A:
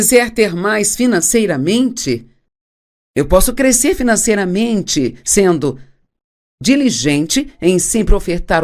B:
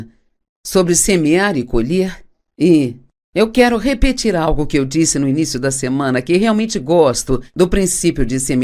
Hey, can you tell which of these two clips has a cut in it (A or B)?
A